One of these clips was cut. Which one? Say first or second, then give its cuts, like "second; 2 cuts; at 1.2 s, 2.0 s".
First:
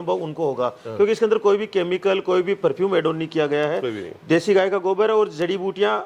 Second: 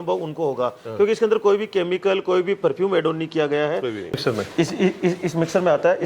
second; 1 cut; at 4.2 s